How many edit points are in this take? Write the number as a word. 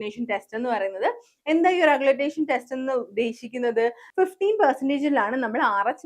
one